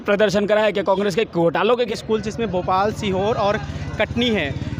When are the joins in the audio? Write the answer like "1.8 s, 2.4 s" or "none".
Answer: 1.7 s